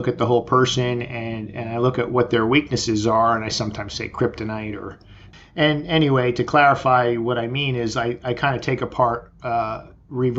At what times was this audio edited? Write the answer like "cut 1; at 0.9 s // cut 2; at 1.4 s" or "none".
cut 1; at 5.2 s